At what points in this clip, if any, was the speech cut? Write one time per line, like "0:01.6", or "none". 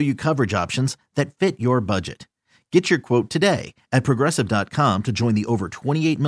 none